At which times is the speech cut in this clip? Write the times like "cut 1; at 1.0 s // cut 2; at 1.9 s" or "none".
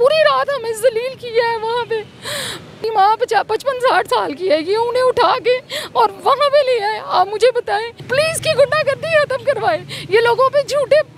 cut 1; at 2.8 s // cut 2; at 7.9 s